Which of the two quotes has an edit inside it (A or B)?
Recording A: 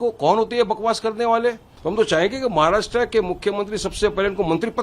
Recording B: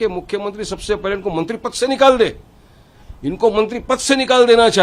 A